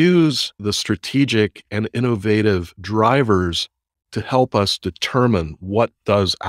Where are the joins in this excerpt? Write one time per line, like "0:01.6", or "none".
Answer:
none